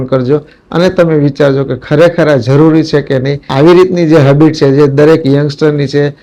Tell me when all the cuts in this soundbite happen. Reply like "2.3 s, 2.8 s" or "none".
3.5 s